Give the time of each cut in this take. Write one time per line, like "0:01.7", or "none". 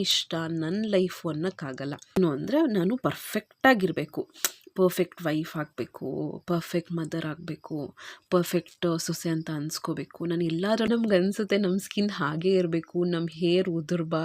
0:02.2
0:10.9